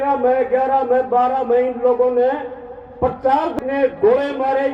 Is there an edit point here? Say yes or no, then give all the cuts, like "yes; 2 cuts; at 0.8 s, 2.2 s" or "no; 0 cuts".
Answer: yes; 1 cut; at 3.6 s